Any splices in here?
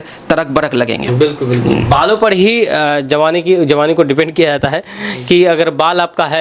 no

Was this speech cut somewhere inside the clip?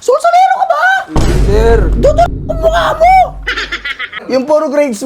yes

